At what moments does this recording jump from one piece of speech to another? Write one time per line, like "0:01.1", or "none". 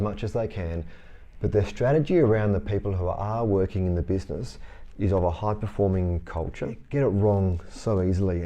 0:06.8